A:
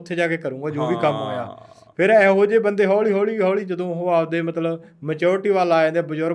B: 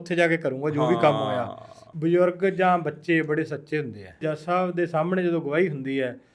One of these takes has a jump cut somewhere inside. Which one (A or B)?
B